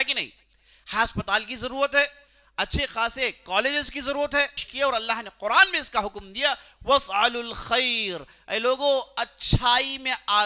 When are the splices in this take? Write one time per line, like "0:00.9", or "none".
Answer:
0:04.6

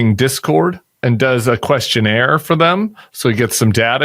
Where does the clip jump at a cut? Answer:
0:01.0

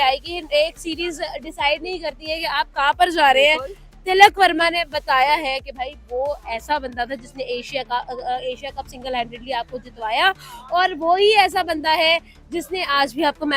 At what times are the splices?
none

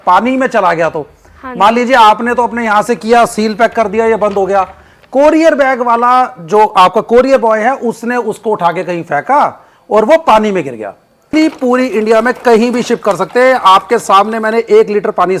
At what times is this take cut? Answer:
0:11.3

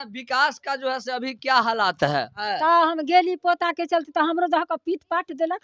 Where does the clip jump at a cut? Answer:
0:02.4

